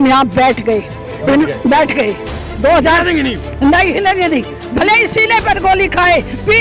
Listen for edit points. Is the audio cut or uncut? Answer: uncut